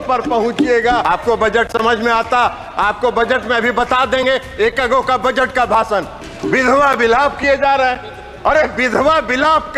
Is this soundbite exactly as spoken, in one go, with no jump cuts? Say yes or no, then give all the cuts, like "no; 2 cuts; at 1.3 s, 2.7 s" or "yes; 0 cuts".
no; 2 cuts; at 1.0 s, 6.2 s